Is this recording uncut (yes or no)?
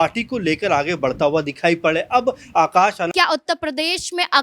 no